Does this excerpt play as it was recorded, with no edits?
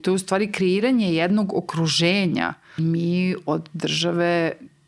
no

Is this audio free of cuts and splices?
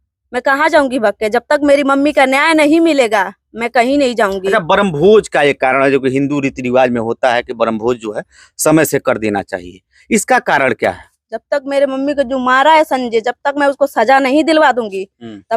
yes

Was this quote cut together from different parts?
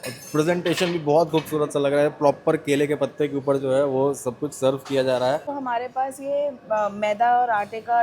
yes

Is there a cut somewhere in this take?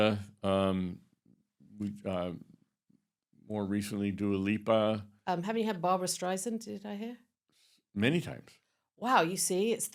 no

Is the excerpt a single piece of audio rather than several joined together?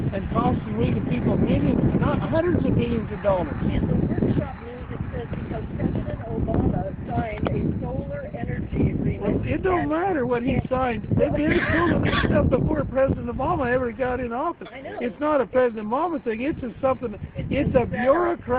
no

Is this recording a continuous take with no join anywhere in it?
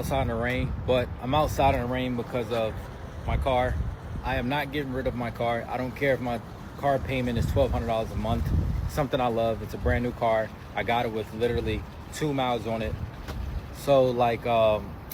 yes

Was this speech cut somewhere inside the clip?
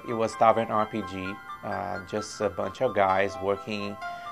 no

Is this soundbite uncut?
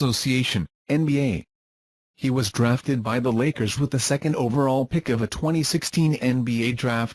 no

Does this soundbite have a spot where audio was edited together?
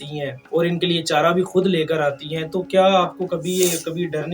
no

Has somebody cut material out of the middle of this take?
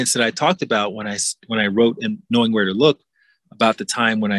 no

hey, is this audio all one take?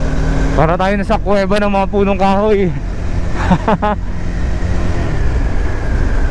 yes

